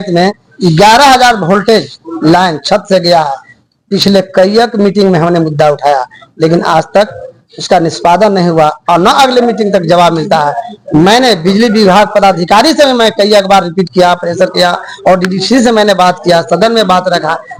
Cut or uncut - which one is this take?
uncut